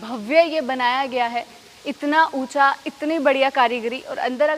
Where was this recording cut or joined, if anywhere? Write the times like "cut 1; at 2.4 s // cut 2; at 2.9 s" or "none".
none